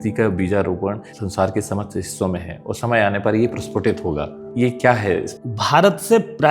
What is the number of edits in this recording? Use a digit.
3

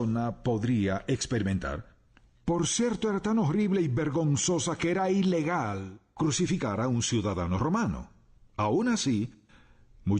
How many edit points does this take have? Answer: 0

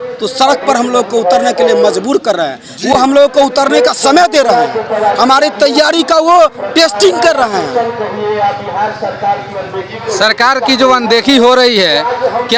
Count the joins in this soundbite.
0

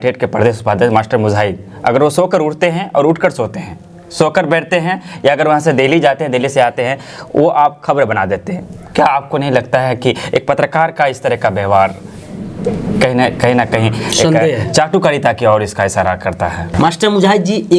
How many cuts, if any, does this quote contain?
1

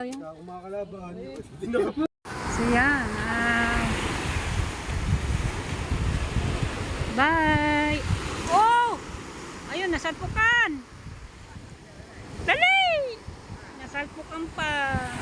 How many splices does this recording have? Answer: 1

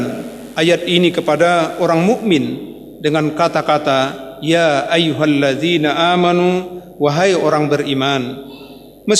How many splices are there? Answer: 0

